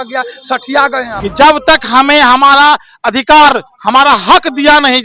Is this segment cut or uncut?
cut